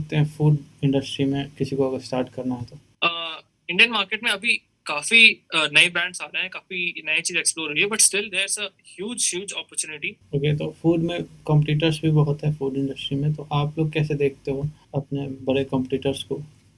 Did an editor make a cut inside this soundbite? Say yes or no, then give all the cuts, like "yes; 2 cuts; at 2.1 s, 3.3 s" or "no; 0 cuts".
yes; 3 cuts; at 2.8 s, 10.1 s, 14.8 s